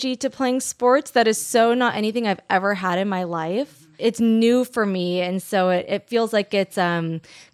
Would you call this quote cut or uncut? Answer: cut